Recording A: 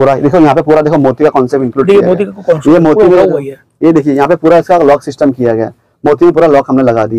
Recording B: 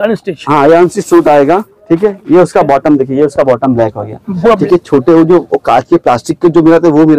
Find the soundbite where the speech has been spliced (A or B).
B